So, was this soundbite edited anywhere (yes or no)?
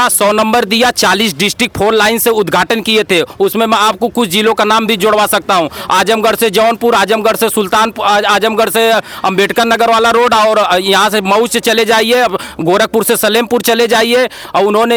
no